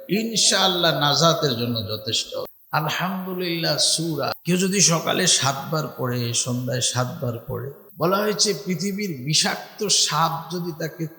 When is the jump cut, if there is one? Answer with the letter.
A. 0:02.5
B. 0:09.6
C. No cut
A